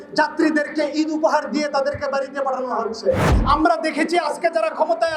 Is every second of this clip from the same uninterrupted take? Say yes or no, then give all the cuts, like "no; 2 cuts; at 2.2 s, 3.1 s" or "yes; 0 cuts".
no; 1 cut; at 3.3 s